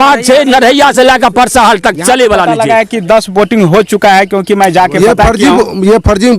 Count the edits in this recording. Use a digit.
1